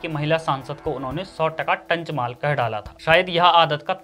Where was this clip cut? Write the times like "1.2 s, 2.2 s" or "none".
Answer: 2.9 s